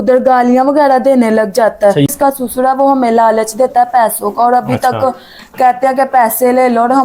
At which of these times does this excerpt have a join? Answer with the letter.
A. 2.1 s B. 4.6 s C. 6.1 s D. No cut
A